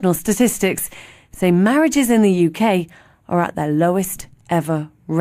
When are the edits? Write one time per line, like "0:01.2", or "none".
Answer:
0:03.3